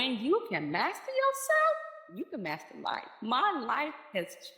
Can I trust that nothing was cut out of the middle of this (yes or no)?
no